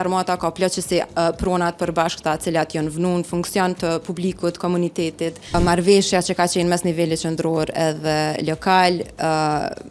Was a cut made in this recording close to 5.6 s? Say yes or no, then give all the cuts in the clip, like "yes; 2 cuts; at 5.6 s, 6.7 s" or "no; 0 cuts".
yes; 1 cut; at 5.6 s